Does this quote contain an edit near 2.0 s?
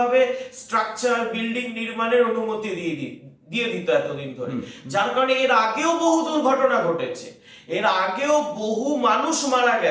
no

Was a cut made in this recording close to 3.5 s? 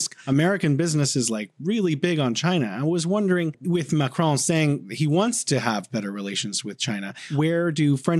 yes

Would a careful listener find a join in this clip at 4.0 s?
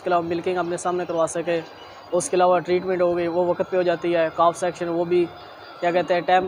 no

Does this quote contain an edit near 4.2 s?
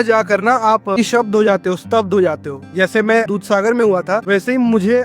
yes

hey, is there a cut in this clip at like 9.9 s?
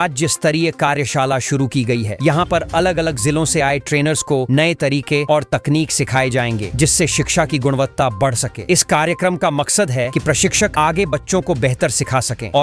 no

